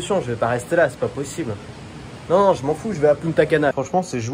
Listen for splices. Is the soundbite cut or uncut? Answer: uncut